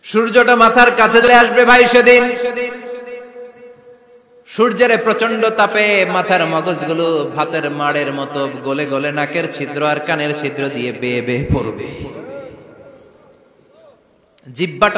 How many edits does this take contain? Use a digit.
1